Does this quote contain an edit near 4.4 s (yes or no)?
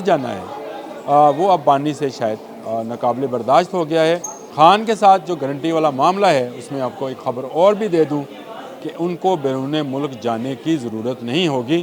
yes